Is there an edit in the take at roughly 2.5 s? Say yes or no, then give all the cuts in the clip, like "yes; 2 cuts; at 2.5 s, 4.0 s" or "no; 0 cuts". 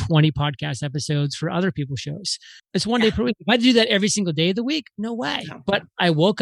yes; 1 cut; at 2.5 s